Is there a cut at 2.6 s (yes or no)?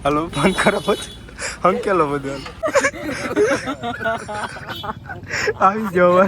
yes